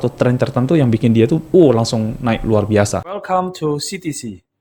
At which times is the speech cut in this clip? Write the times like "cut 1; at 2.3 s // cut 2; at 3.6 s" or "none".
cut 1; at 2.9 s